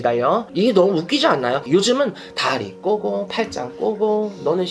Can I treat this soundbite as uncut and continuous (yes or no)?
no